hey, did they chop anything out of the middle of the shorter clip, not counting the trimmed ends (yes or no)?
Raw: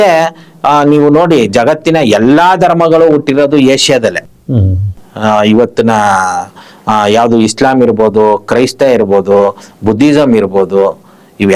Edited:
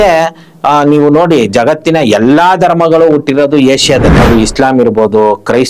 yes